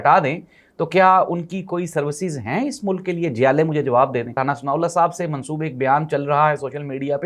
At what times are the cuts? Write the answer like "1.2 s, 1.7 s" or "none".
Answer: 4.4 s

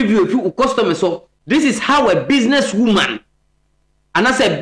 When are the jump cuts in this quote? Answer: 1.3 s

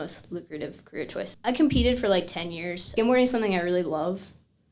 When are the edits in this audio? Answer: 1.3 s, 2.9 s

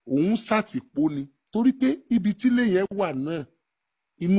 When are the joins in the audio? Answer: 1.3 s

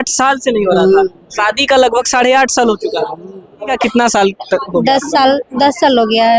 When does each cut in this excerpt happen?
3.7 s

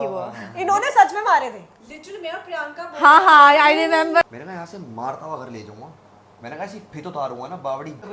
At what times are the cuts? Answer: 4.2 s

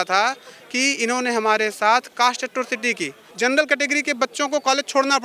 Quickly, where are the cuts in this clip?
3.2 s

